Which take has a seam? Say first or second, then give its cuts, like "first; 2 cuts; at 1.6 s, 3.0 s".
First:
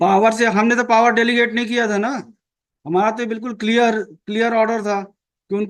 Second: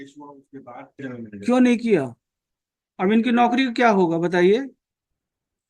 second; 1 cut; at 1.0 s